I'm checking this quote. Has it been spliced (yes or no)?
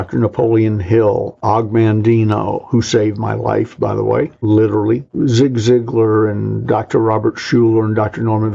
yes